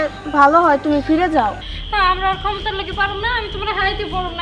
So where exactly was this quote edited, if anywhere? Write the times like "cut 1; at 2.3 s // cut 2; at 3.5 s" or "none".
cut 1; at 1.7 s